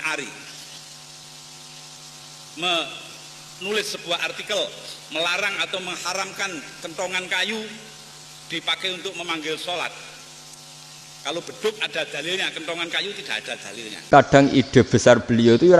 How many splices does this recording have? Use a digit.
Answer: 1